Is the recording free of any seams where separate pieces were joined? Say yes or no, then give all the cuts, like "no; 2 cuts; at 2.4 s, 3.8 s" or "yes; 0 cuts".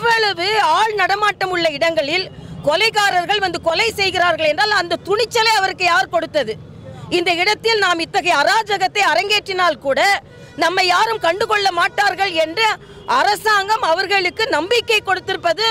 yes; 0 cuts